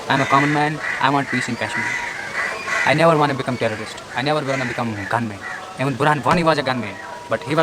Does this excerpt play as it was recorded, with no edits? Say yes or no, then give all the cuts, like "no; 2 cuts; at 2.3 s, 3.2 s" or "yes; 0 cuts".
yes; 0 cuts